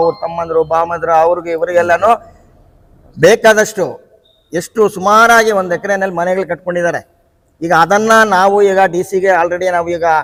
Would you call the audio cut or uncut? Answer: uncut